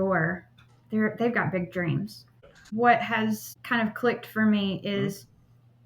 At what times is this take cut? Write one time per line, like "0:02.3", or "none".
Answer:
0:02.4
0:03.5